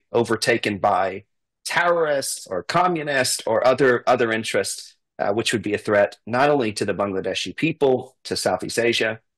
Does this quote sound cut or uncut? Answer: uncut